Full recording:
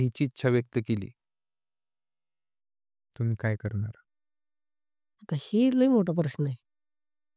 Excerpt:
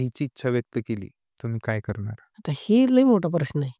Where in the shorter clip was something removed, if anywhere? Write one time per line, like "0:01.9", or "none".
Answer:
0:01.2
0:02.2

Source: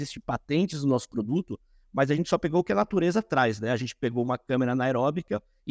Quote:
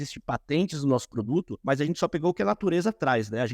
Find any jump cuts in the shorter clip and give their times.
0:01.5

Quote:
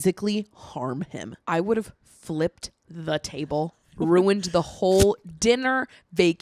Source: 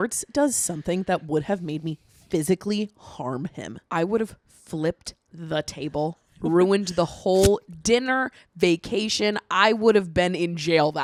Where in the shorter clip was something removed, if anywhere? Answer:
none

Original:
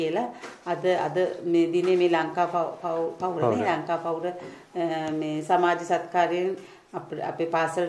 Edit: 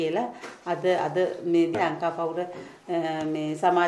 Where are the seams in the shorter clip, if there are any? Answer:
0:01.7

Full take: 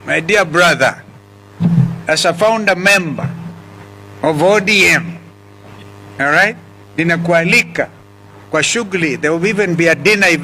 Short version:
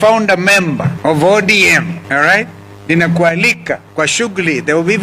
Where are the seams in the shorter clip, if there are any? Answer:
0:00.9
0:02.0
0:03.9

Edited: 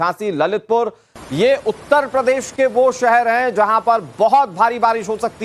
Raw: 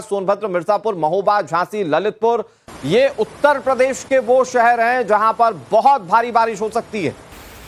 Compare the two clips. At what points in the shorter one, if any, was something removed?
none

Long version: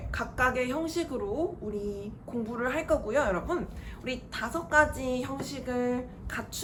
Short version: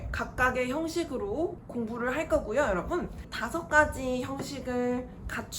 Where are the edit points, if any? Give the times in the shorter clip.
0:01.6
0:03.3

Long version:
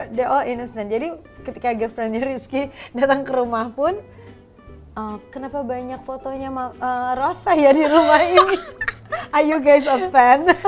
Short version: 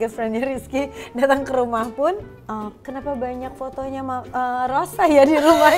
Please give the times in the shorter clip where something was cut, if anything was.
0:02.3

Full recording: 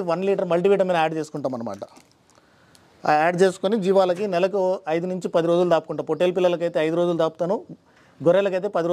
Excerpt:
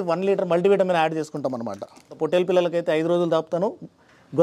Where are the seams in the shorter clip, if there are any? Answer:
0:02.1

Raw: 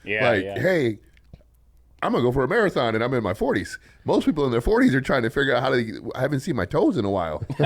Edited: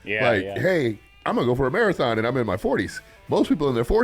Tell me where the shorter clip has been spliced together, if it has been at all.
0:01.1

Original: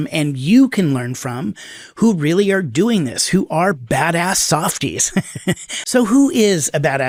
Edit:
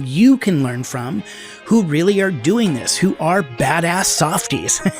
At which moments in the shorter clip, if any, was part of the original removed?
none

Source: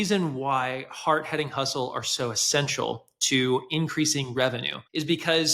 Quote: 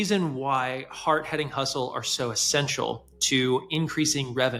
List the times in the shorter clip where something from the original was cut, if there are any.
none

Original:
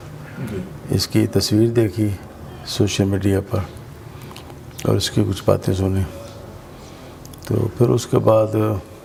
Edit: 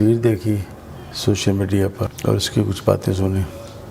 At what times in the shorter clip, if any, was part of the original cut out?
0:02.1

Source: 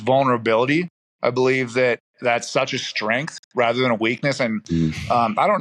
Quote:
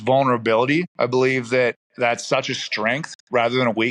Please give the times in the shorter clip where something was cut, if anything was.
0:00.9

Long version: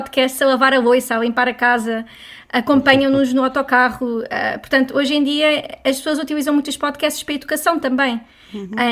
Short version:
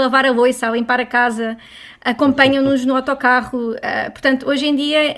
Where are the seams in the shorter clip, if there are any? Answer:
none

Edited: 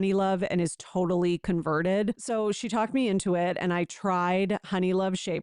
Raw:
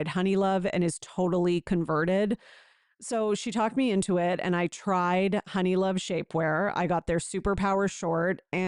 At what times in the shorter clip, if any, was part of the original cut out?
0:02.2

